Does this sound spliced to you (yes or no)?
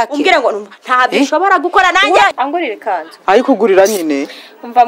yes